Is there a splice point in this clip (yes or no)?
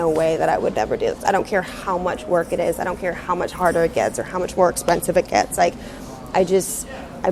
no